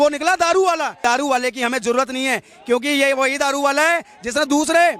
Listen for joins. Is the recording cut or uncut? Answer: cut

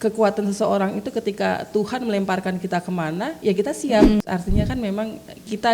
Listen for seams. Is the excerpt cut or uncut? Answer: cut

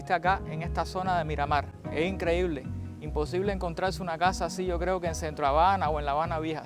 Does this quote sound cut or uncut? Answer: uncut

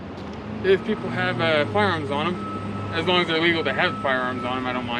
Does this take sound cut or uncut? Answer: uncut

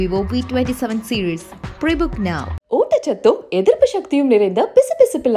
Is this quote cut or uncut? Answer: uncut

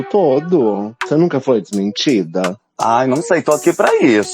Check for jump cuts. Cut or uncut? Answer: cut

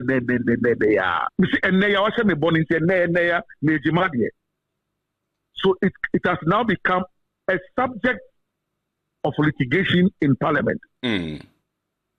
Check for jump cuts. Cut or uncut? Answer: cut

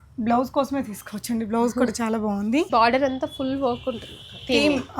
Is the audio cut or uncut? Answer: cut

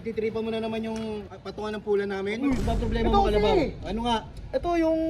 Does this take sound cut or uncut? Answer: cut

